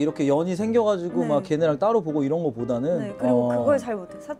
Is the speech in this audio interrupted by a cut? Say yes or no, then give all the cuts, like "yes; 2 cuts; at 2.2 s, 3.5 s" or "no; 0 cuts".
no; 0 cuts